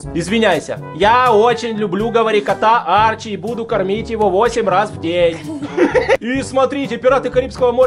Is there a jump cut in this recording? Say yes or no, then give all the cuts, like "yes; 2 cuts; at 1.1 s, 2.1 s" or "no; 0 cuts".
yes; 1 cut; at 6.2 s